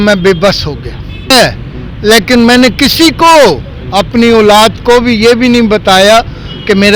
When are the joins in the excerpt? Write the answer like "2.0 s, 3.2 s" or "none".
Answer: 1.3 s